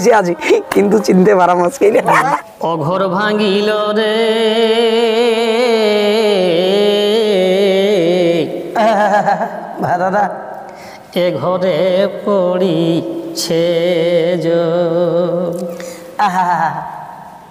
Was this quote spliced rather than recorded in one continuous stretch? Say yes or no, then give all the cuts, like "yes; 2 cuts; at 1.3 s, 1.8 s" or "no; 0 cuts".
yes; 1 cut; at 2.4 s